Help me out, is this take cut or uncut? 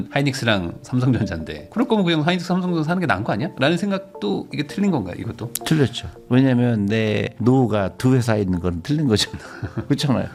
uncut